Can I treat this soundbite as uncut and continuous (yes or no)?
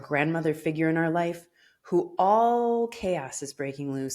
yes